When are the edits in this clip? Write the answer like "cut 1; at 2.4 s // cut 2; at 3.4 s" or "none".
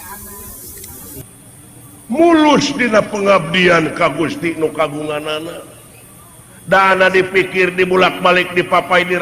cut 1; at 1.2 s